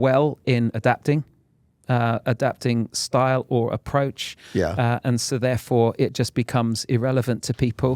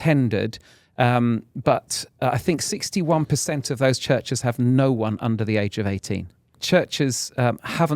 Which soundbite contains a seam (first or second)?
second